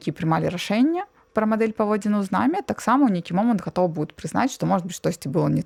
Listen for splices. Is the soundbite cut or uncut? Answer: uncut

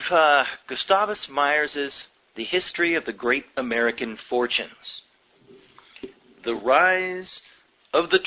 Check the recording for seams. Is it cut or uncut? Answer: uncut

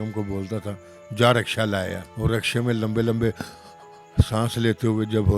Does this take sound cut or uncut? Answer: cut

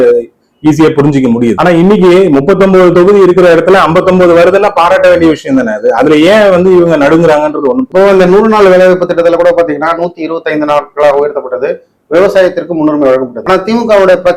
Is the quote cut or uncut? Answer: uncut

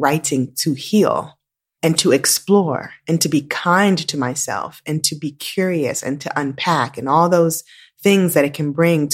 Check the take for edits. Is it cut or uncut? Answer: uncut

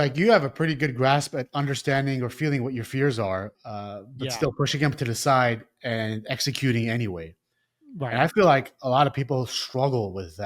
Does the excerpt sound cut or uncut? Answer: uncut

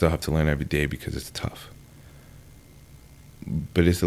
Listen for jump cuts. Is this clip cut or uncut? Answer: uncut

